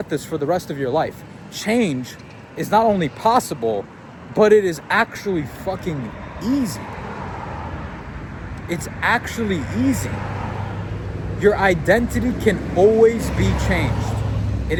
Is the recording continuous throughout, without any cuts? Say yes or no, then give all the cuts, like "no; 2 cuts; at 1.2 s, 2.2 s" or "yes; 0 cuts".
yes; 0 cuts